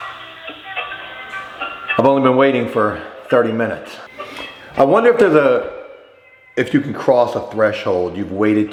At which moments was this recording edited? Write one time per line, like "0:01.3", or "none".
none